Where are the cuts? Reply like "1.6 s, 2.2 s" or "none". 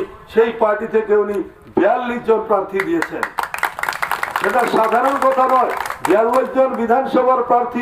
none